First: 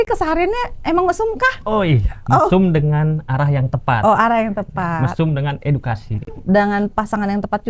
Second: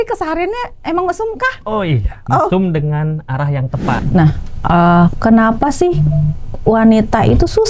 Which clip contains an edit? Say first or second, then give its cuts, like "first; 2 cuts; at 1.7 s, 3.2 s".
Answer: second; 1 cut; at 4.0 s